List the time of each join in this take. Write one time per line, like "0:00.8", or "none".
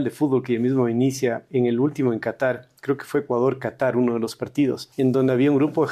0:04.9